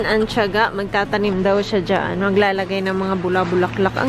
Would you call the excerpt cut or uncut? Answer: uncut